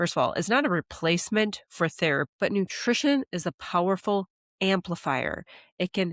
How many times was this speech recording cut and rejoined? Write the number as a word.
one